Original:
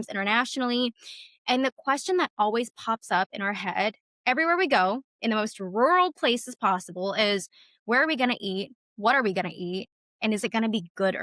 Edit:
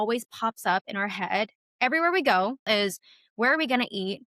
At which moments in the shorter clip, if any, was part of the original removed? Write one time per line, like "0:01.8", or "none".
0:02.6